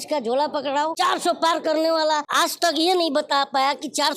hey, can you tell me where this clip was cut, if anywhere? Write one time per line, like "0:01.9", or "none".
0:00.9
0:02.3